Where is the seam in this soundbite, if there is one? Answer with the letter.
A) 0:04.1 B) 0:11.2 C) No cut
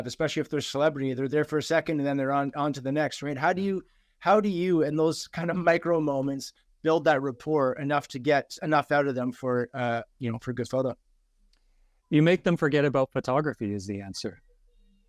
C